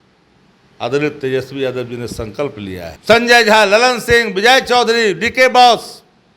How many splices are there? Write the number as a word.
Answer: one